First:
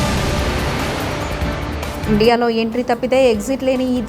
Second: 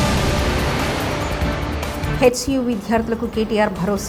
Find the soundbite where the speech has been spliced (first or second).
first